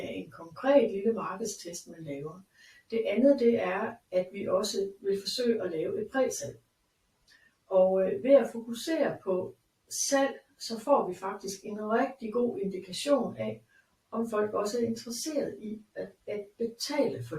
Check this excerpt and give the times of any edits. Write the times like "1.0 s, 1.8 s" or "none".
none